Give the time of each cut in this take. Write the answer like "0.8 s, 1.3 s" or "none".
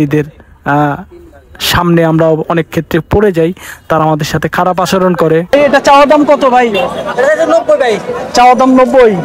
5.5 s